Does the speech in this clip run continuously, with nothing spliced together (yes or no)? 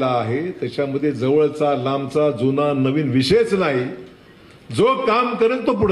yes